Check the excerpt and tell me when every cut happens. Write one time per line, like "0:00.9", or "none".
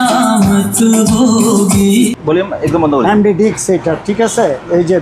0:02.2